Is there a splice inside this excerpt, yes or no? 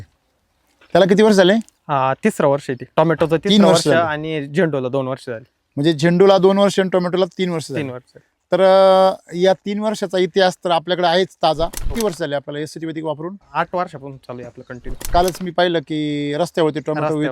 yes